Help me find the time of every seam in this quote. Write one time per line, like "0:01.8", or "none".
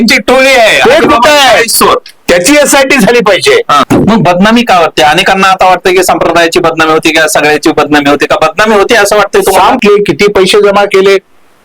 0:03.8
0:09.8